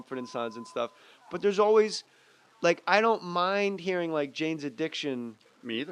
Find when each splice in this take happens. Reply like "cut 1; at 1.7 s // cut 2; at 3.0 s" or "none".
cut 1; at 4.4 s